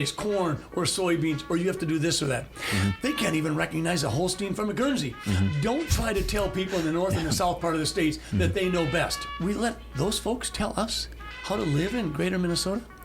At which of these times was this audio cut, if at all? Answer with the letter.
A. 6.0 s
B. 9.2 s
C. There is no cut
B